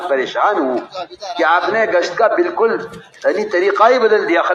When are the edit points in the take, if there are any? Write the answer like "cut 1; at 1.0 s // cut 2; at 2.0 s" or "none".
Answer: none